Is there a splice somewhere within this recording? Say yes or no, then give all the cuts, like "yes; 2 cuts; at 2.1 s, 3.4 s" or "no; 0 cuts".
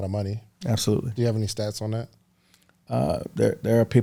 no; 0 cuts